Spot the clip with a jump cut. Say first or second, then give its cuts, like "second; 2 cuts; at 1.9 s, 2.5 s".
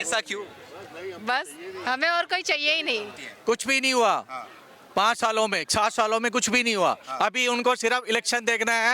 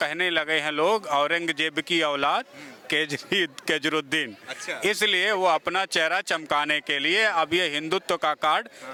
first; 1 cut; at 3.3 s